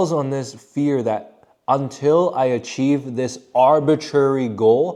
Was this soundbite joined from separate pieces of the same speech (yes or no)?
no